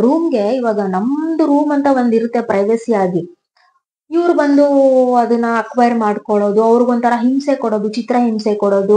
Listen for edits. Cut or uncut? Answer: uncut